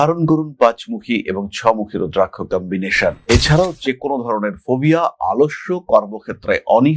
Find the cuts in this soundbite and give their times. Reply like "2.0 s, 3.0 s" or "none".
3.2 s